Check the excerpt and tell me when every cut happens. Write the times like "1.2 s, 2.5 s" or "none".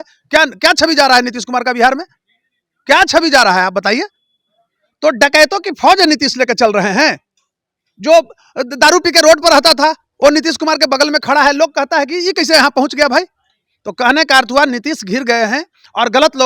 none